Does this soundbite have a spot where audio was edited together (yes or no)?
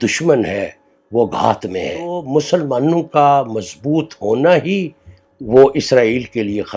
yes